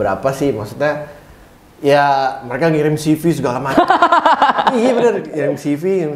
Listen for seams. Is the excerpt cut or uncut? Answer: uncut